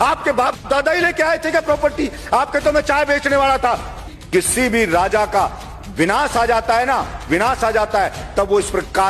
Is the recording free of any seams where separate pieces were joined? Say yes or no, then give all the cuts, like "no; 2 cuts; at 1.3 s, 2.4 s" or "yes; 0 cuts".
no; 1 cut; at 4.1 s